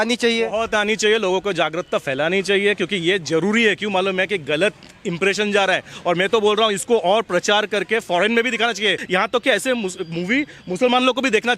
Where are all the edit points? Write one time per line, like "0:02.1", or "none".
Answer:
0:09.0